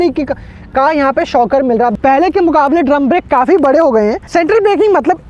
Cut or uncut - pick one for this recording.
cut